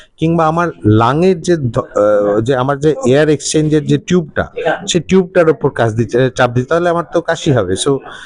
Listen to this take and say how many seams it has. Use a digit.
0